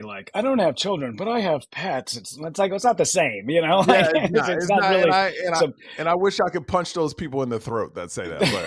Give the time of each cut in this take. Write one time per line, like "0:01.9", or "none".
none